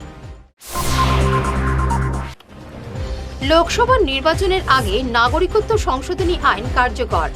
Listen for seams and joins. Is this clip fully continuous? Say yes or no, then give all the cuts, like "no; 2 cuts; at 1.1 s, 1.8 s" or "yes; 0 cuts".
no; 1 cut; at 2.2 s